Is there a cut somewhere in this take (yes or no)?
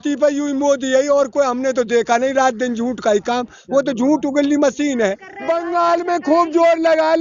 yes